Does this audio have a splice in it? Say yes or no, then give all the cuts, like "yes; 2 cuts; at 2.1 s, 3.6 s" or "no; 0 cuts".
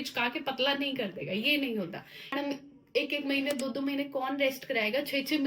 yes; 1 cut; at 2.3 s